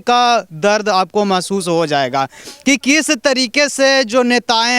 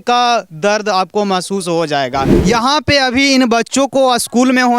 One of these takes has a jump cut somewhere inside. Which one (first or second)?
second